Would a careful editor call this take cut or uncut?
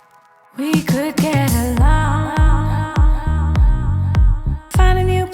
uncut